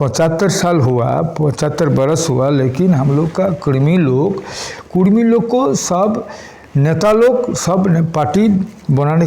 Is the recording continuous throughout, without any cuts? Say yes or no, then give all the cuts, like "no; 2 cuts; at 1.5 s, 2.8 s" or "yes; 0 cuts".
yes; 0 cuts